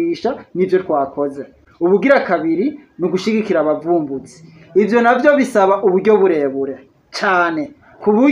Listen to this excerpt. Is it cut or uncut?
uncut